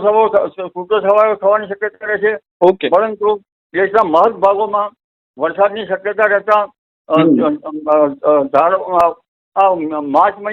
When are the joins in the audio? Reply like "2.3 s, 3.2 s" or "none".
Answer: none